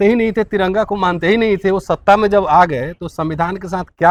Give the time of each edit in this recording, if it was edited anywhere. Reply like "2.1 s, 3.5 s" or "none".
none